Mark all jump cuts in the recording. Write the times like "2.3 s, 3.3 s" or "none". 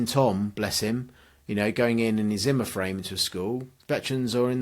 none